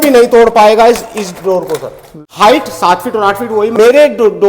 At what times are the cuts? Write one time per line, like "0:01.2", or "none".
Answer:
0:02.2
0:03.7